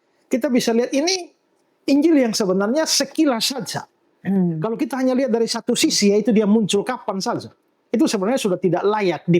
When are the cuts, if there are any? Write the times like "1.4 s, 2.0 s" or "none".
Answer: none